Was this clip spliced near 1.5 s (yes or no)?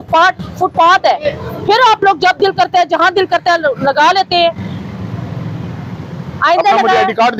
no